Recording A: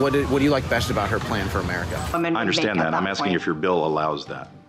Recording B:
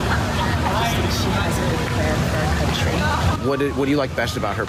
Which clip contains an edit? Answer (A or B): A